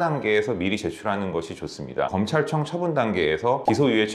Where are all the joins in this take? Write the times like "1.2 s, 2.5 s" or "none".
2.1 s